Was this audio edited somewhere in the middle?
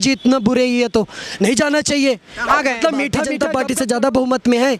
yes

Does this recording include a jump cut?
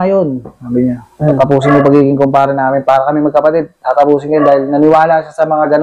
no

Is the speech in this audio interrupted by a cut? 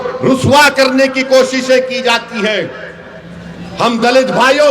no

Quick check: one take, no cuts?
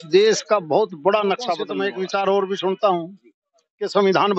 no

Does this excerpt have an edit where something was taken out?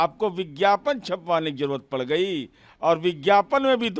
no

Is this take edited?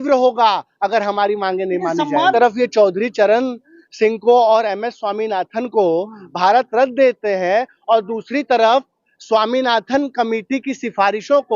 yes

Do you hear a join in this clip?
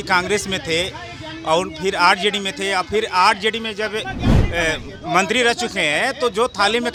no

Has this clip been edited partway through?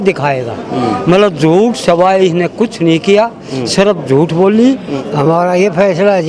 yes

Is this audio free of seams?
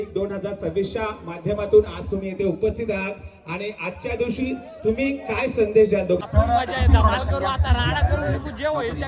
no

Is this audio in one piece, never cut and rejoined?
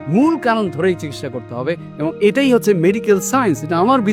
yes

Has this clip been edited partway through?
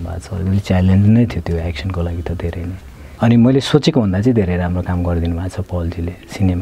yes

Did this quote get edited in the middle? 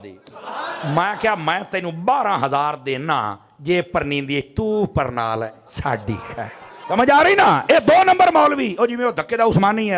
yes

